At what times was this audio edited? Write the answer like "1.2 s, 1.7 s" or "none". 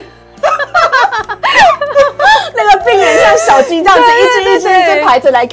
none